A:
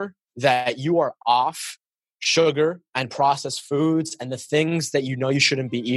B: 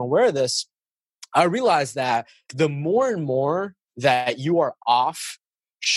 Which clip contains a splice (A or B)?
B